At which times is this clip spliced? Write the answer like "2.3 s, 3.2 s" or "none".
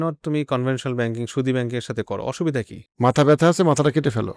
none

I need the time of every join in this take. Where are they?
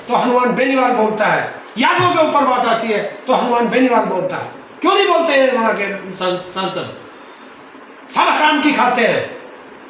none

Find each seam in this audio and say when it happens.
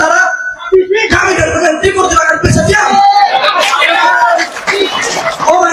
none

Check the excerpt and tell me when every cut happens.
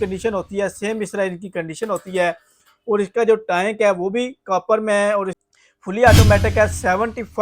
5.4 s

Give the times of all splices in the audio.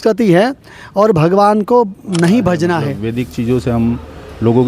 3.0 s

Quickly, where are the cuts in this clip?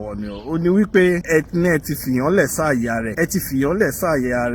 1.2 s, 3.1 s

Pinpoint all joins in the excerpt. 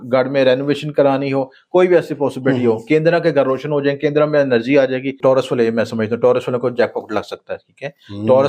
5.1 s

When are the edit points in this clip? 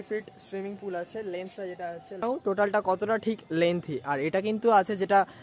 none

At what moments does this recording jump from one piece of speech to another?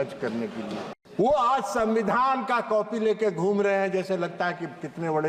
1.0 s

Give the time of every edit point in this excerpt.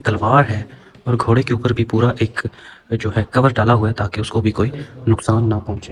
none

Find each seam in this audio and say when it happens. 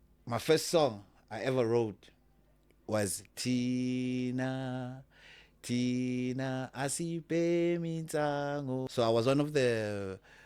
8.9 s

